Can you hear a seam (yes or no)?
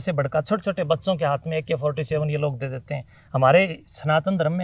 no